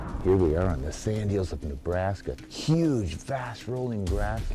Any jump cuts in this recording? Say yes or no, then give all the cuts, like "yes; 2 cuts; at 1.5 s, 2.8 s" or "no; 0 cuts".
yes; 1 cut; at 2.4 s